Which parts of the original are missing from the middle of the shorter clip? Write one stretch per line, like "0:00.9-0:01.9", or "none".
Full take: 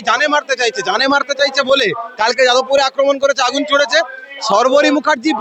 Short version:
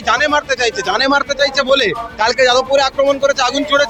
none